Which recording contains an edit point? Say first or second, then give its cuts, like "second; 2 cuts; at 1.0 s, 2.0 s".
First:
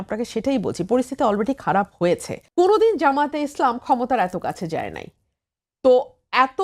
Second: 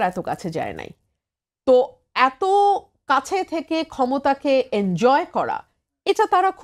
first; 1 cut; at 2.4 s